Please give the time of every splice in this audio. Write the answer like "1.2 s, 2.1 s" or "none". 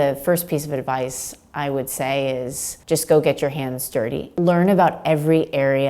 4.3 s